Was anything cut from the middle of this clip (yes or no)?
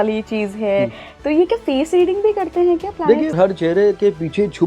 yes